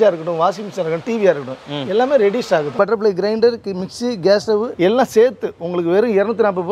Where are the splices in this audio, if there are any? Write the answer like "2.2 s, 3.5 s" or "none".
2.7 s, 4.7 s